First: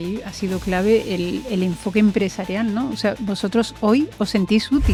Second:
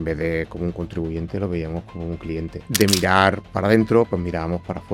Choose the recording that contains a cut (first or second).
second